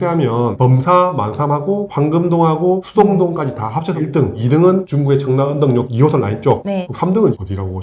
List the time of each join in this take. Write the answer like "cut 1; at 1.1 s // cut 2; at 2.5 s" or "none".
none